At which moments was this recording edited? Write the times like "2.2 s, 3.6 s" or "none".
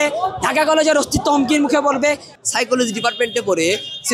2.3 s